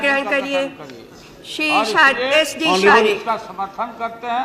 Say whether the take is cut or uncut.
uncut